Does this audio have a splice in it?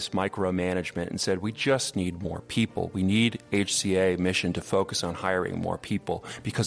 no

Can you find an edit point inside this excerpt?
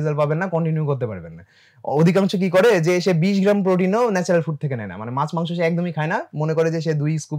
no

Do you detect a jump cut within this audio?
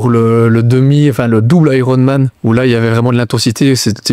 yes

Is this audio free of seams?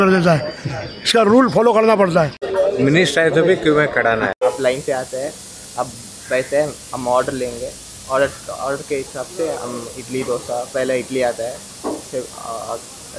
no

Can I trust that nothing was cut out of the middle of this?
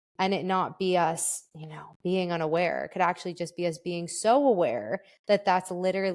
yes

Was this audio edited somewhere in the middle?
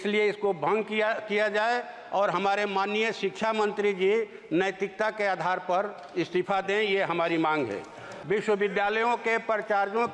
yes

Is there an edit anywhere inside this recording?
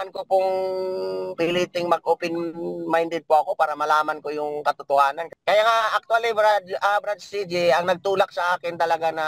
yes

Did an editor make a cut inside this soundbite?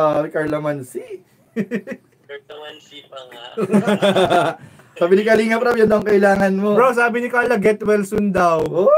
no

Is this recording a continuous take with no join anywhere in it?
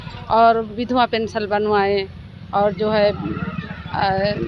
yes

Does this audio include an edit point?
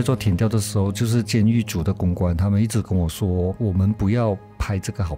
yes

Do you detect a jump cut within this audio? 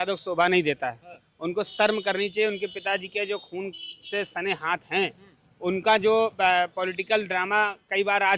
no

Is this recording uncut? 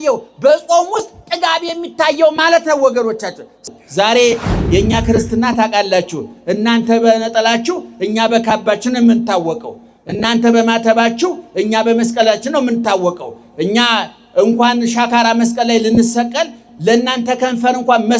no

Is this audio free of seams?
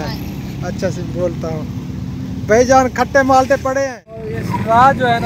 no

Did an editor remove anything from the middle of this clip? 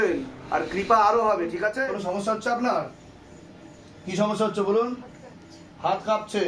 yes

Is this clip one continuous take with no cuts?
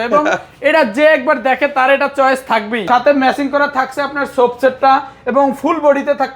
no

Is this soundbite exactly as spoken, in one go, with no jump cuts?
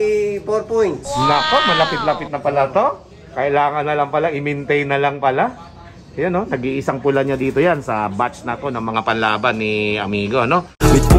yes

